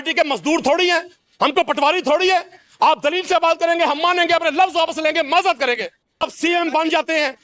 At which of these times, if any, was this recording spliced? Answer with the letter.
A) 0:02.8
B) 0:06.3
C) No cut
B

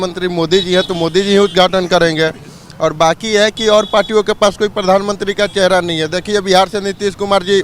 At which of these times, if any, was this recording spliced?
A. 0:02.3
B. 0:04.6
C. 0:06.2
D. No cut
D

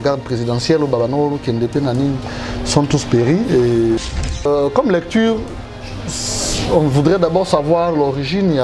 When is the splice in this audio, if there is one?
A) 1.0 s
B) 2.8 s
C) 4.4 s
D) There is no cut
C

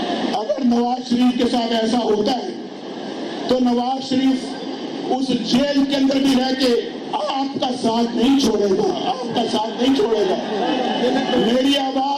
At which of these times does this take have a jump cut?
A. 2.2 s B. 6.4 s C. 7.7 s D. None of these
D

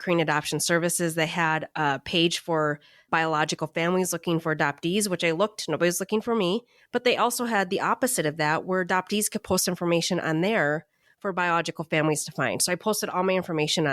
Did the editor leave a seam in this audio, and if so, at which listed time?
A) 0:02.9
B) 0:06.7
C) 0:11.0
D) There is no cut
D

